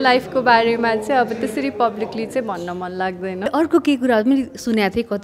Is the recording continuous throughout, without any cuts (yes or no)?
no